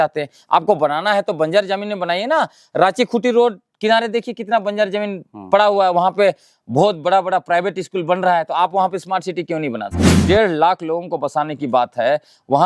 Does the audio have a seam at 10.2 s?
yes; 1 cut; at 10.2 s

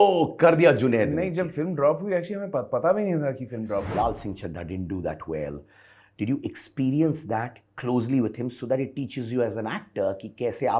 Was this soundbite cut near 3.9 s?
yes; 1 cut; at 3.9 s

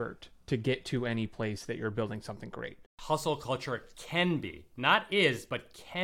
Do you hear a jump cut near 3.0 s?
yes; 1 cut; at 3.0 s

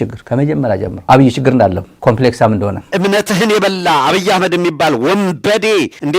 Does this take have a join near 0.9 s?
yes; 3 cuts; at 0.9 s, 1.9 s, 2.9 s

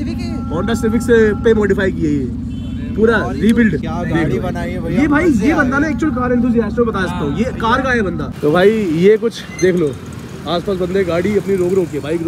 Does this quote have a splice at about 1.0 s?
no; 2 cuts; at 3.9 s, 8.3 s

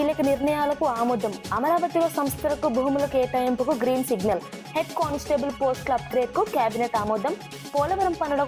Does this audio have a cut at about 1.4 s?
no; 0 cuts

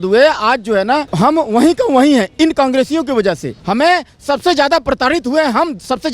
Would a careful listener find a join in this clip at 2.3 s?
no; 2 cuts; at 1.1 s, 3.5 s

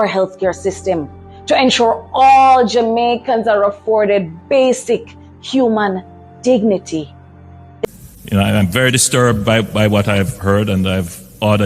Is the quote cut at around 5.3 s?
no; 1 cut; at 7.8 s

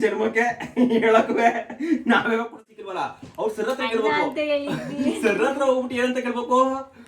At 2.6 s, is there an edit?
yes; 1 cut; at 2.6 s

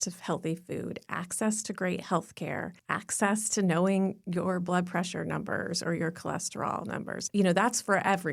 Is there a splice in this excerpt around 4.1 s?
no; 2 cuts; at 2.8 s, 7.2 s

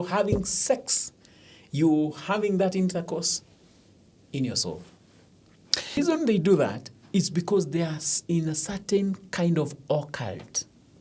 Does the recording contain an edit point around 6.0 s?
yes; 1 cut; at 6.0 s

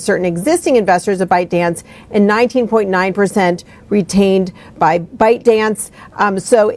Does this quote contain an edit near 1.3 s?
no; 1 cut; at 4.6 s

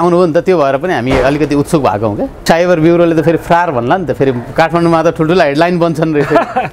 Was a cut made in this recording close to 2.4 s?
yes; 1 cut; at 2.4 s

